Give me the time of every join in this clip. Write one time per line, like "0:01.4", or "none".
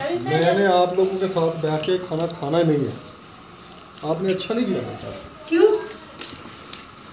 none